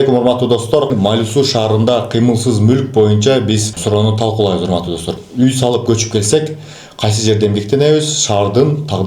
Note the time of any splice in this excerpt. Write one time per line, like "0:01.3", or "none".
0:00.9
0:03.7
0:05.0

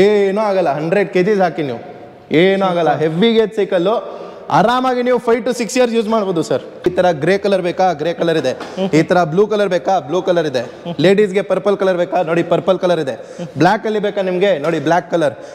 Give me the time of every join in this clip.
0:06.9

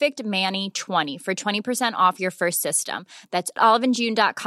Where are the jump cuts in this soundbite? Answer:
0:01.1

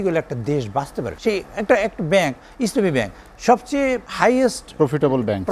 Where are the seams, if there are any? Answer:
0:01.1
0:04.1

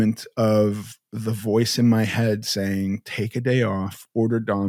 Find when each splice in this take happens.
none

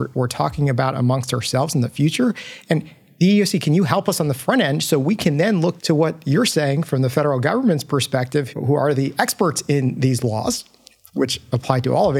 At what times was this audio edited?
0:05.8
0:08.5

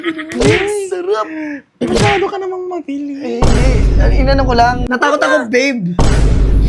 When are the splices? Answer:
0:04.8

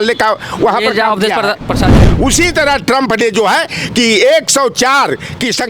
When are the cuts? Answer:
0:01.9

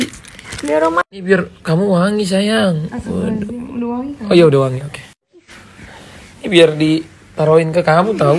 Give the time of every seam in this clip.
0:01.2
0:05.3

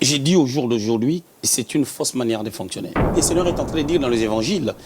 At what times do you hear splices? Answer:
0:01.4
0:03.1

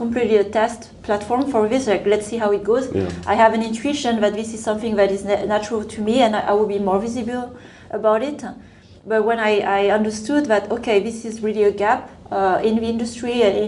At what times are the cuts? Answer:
none

